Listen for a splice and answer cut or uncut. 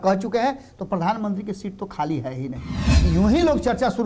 cut